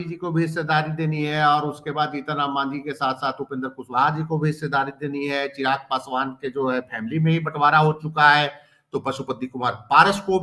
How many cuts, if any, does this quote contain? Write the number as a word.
zero